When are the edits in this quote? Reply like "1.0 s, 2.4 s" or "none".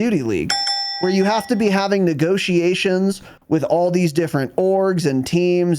none